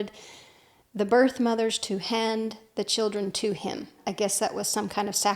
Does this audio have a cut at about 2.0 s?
no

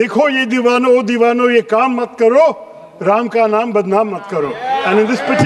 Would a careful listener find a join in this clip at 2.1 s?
no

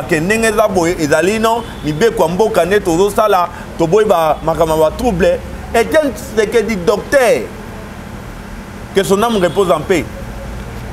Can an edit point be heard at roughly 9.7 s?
no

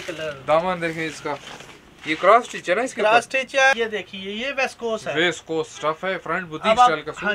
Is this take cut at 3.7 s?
yes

